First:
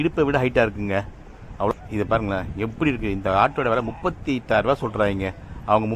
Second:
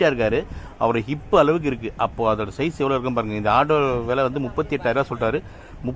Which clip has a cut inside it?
first; 1 cut; at 1.7 s

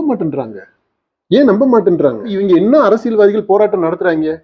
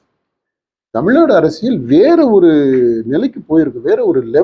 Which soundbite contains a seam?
first; 1 cut; at 2.4 s

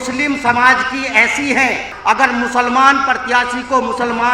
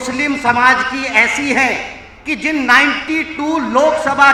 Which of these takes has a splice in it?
first; 1 cut; at 1.9 s

